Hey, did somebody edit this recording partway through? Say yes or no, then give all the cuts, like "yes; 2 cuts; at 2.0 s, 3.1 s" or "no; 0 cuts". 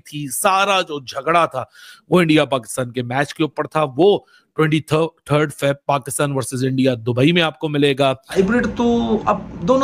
yes; 1 cut; at 8.4 s